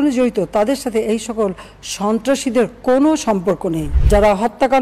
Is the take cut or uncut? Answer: cut